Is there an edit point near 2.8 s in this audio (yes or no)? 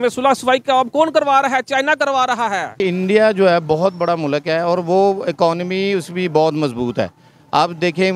yes